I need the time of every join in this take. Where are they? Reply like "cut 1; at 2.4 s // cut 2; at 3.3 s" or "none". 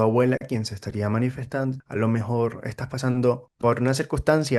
cut 1; at 1.8 s // cut 2; at 3.5 s